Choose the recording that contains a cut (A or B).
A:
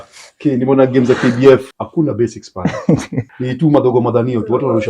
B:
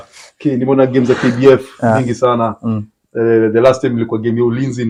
A